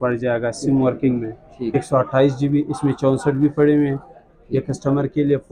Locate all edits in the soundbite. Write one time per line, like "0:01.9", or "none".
0:01.7